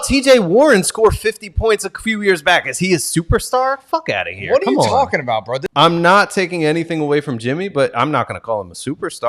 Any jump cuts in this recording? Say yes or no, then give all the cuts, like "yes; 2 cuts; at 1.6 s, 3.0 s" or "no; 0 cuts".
yes; 1 cut; at 5.6 s